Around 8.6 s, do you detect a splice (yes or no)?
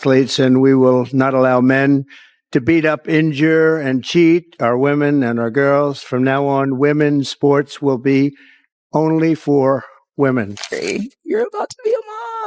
no